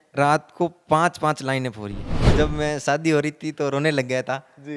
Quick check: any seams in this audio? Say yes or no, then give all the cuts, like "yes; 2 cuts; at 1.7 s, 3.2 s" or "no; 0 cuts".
yes; 1 cut; at 2.2 s